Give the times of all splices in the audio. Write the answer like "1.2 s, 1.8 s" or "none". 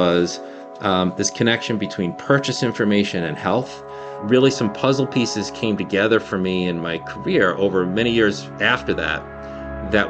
none